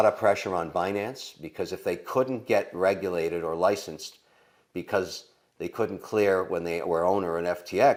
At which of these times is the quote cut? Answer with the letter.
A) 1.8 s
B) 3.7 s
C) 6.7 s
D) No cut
D